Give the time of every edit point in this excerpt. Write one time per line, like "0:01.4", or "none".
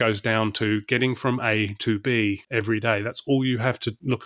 none